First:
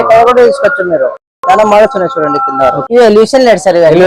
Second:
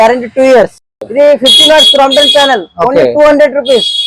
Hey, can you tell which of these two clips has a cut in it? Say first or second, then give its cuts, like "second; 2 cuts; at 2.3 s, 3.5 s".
first; 1 cut; at 2.8 s